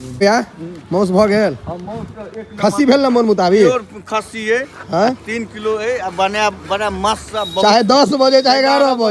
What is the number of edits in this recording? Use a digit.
0